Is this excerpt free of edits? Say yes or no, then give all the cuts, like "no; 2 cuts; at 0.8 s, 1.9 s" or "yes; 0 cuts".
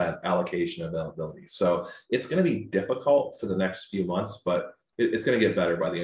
yes; 0 cuts